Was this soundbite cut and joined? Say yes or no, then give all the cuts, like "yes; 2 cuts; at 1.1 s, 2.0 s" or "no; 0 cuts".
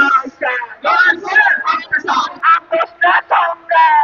no; 0 cuts